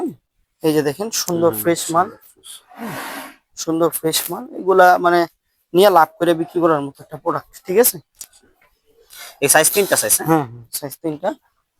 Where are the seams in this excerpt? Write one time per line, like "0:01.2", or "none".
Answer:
none